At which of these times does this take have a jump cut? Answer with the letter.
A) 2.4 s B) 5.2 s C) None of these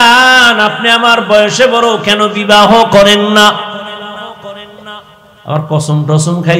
C